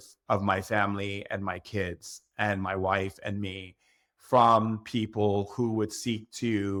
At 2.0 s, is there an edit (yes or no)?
no